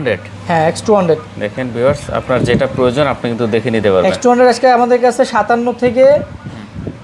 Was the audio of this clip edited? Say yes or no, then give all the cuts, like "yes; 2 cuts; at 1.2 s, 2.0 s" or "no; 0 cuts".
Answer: no; 0 cuts